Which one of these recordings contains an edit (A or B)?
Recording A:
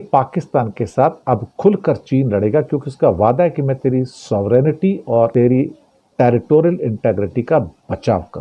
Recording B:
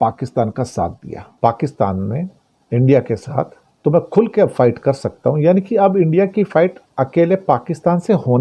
B